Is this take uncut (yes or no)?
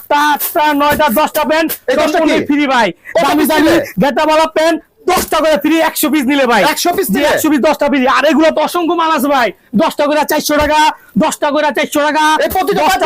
yes